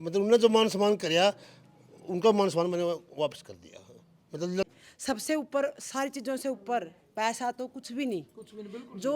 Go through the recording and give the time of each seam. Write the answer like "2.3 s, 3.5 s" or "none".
4.7 s